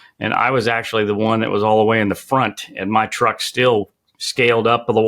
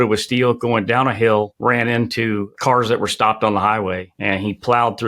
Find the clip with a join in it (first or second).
second